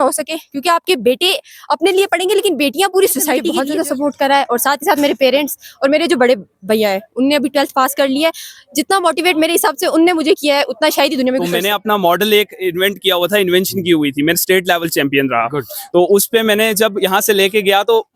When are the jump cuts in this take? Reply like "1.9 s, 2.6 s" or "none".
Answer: 3.6 s, 11.6 s